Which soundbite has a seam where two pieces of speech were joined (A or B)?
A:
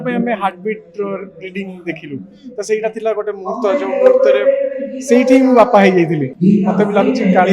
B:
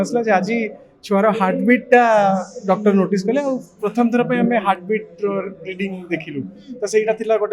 A